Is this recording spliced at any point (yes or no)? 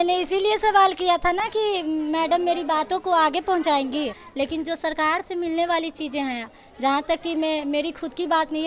yes